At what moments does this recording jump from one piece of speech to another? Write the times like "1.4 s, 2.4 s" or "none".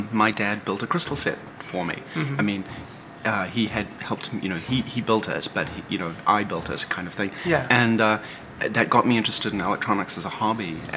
none